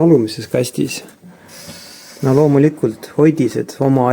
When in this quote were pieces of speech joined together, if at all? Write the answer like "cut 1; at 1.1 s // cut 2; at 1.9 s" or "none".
none